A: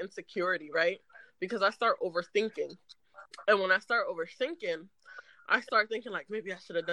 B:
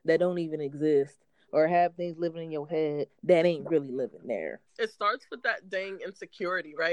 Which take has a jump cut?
B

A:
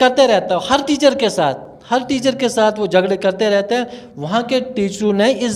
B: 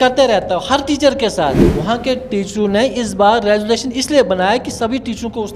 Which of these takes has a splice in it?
B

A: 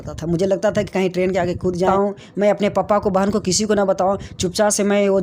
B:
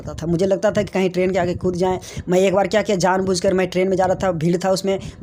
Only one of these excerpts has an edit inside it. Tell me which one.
A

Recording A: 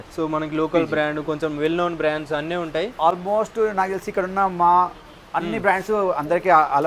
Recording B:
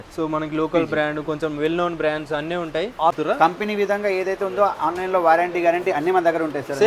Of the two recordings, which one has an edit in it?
B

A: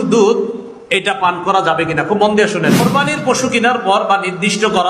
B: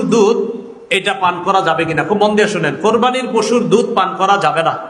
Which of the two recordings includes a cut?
A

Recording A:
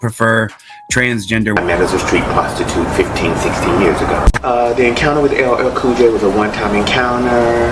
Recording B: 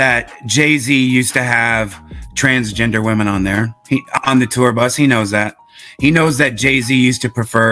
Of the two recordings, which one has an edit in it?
A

